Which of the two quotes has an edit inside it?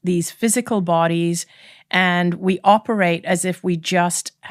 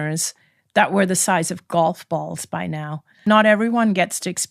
second; 1 cut; at 3.1 s

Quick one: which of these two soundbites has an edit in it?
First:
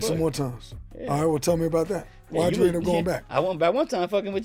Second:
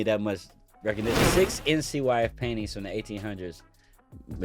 second; 1 cut; at 1.3 s

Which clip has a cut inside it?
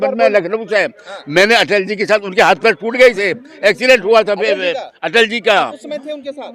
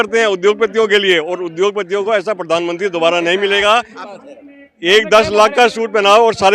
second; 1 cut; at 4.0 s

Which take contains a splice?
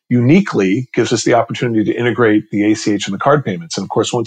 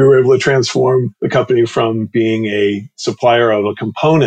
second; 1 cut; at 1.2 s

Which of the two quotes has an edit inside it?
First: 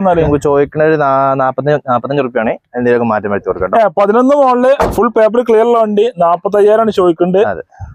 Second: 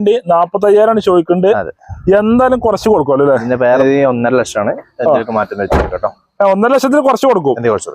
second; 1 cut; at 3.8 s

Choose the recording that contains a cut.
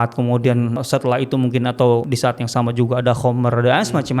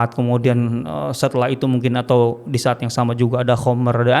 first; 2 cuts; at 0.8 s, 2.1 s

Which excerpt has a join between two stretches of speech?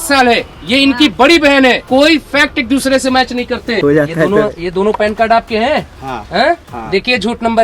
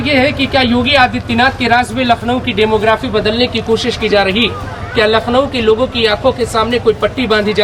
first; 2 cuts; at 1.8 s, 3.8 s

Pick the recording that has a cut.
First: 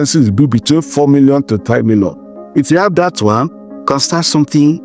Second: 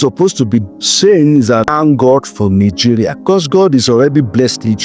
second; 2 cuts; at 1.7 s, 3.1 s

